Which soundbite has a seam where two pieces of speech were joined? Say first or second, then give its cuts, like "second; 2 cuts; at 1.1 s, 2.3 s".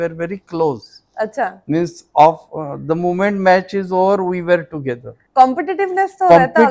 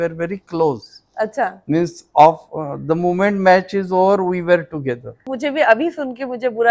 second; 1 cut; at 5.3 s